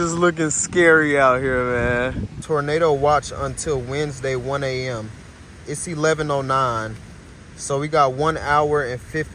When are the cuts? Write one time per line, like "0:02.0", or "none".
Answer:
0:02.3